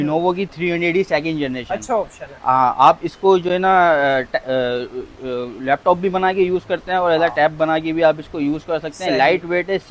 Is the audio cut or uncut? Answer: uncut